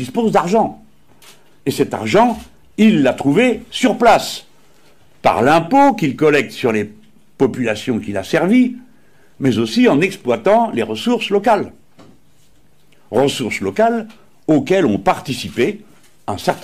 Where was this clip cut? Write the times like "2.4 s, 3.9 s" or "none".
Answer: none